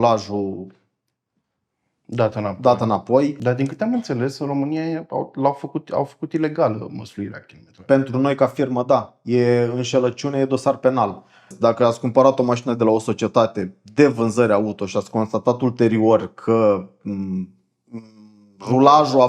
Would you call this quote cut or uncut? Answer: cut